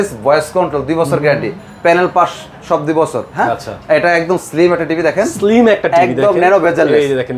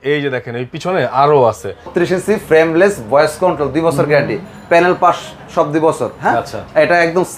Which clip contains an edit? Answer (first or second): second